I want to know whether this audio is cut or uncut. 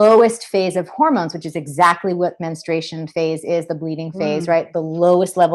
uncut